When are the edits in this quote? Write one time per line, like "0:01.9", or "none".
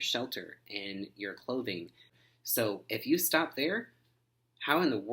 0:02.1